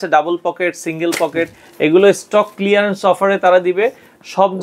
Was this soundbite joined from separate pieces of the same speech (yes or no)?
no